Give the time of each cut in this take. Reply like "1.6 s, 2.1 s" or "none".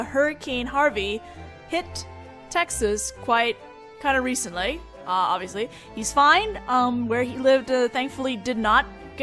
1.4 s

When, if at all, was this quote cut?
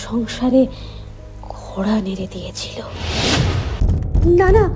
3.7 s

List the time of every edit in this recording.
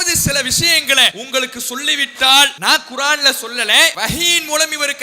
1.2 s, 2.5 s, 4.0 s

